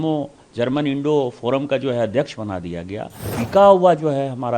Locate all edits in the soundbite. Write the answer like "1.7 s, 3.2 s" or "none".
3.3 s